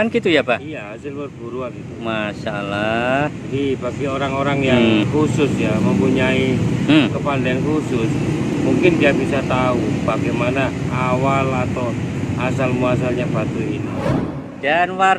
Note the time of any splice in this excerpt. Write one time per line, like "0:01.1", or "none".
0:05.0
0:13.9